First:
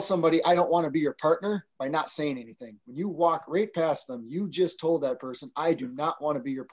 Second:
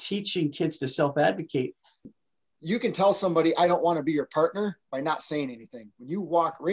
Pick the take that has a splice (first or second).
second